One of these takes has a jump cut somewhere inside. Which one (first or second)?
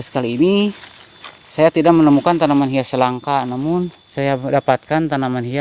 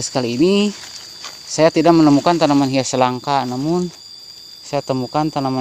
first